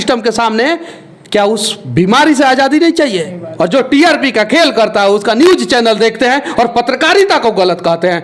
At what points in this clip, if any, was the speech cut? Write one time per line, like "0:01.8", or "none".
0:03.4